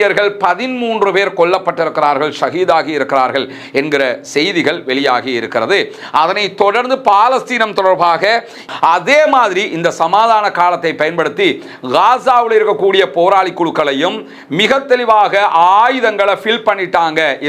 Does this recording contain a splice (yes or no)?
yes